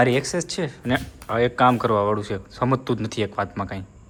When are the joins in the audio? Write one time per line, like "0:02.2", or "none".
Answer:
none